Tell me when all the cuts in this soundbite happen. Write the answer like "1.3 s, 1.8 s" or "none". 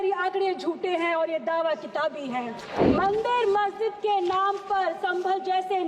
2.6 s